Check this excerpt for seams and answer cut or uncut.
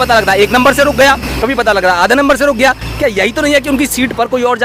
uncut